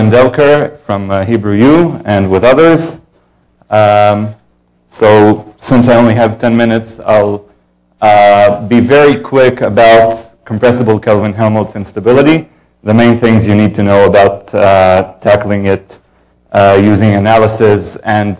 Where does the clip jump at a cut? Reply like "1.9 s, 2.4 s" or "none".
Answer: 12.6 s